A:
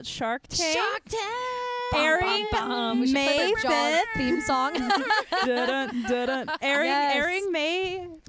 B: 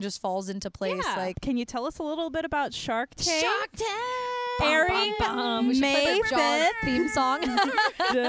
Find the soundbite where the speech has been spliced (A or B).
B